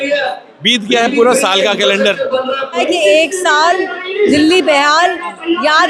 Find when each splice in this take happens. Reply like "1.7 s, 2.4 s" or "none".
2.8 s